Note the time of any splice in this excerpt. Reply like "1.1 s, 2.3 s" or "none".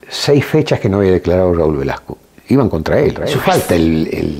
3.4 s